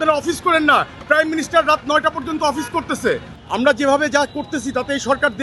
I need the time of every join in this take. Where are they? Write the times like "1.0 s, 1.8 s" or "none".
3.3 s